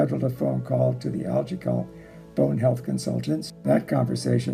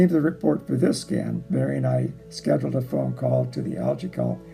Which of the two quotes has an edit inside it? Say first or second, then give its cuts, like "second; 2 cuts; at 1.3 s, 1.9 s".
first; 1 cut; at 3.5 s